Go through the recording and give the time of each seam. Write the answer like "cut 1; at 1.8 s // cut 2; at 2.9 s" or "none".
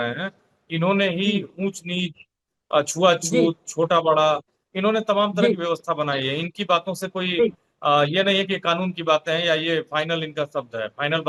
none